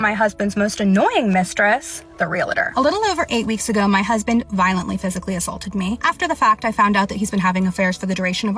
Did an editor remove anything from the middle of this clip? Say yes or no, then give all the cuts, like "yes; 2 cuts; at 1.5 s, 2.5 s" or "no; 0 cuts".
yes; 1 cut; at 6.0 s